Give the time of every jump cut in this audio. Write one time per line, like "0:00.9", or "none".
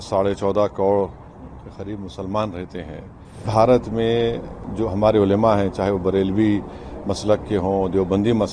0:03.5